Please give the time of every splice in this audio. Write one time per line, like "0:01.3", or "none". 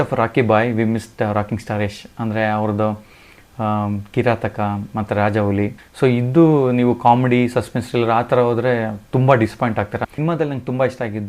0:05.8
0:10.0

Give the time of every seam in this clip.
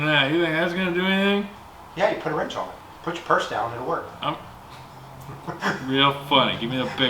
0:02.9

